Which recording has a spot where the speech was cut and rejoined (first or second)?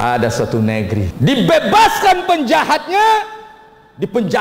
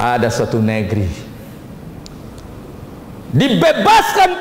first